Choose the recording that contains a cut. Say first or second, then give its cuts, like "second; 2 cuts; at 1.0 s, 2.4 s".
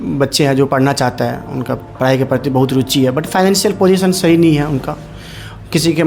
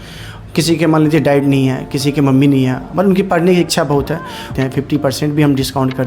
second; 1 cut; at 4.5 s